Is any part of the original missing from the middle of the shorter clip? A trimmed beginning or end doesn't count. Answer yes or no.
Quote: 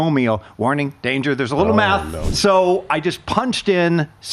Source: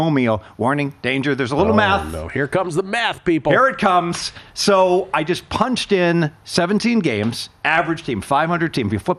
yes